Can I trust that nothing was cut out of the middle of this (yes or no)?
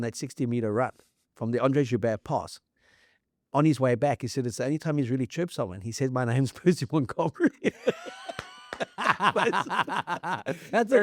yes